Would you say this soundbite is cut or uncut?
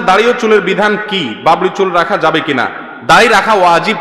uncut